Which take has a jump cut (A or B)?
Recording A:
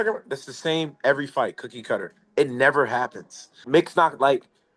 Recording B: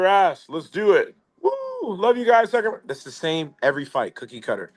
A